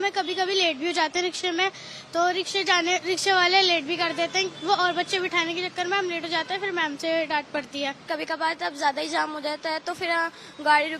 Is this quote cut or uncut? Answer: cut